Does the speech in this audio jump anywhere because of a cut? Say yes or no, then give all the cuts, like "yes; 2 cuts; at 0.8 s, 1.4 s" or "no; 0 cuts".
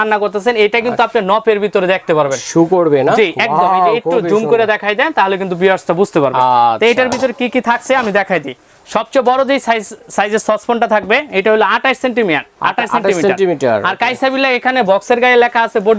no; 0 cuts